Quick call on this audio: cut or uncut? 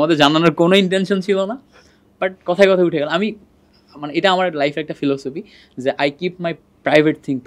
uncut